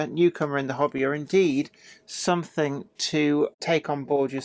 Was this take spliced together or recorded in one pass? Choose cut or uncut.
cut